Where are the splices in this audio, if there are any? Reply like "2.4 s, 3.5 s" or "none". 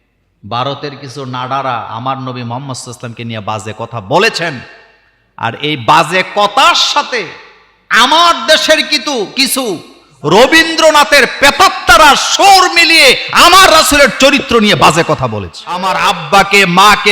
15.9 s